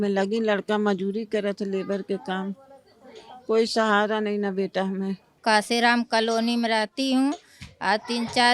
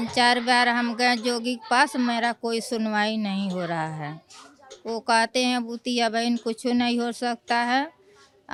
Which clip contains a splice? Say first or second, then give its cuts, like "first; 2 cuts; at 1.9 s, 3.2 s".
first; 1 cut; at 5.3 s